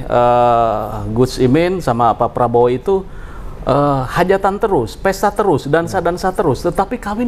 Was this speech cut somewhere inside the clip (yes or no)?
no